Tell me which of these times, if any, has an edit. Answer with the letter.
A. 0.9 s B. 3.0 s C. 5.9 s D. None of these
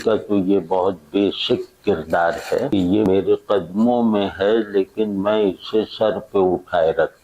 B